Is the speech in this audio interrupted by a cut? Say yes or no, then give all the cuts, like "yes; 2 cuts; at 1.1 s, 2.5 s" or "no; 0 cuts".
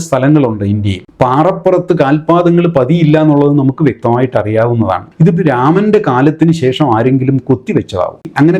no; 0 cuts